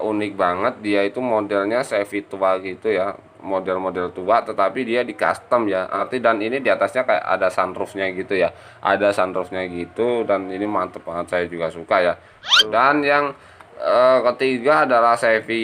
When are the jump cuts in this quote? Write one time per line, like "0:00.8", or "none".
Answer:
0:06.0
0:12.6